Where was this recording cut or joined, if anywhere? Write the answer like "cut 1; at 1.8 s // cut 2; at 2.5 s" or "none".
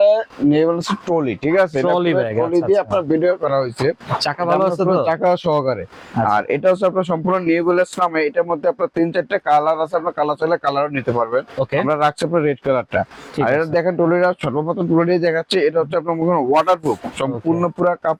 none